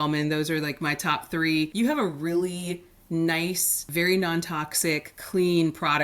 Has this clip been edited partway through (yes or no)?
yes